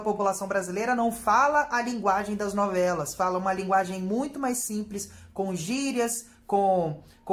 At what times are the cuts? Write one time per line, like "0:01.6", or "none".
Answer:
none